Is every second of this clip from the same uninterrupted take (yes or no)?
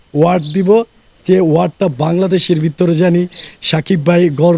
yes